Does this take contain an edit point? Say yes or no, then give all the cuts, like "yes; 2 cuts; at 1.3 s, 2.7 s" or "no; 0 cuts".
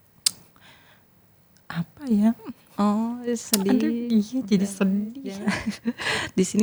no; 0 cuts